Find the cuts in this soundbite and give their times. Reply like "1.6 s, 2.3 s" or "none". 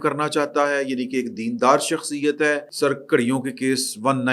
2.7 s